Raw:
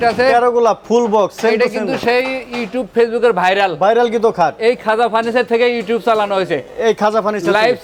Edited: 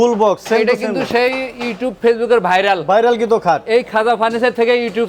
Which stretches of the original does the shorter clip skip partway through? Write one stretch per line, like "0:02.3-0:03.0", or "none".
none